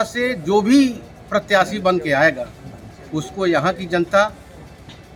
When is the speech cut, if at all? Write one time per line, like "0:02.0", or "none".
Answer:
none